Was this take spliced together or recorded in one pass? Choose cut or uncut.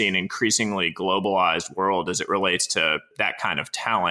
cut